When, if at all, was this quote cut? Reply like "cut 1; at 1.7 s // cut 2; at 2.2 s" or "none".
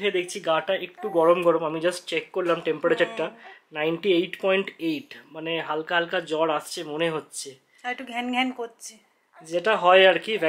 none